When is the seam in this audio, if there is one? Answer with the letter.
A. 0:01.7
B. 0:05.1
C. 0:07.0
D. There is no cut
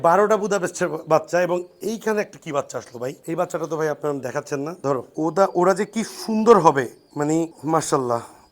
B